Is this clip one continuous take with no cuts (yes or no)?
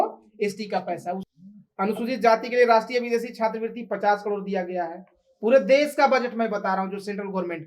no